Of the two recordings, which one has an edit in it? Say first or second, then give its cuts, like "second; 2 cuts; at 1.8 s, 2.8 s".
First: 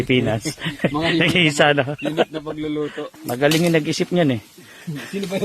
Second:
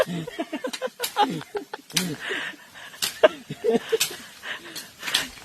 first; 1 cut; at 3.1 s